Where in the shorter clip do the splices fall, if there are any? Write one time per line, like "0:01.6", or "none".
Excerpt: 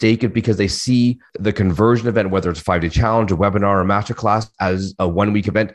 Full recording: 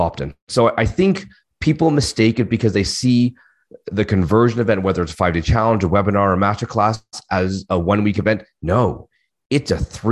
0:01.3
0:04.5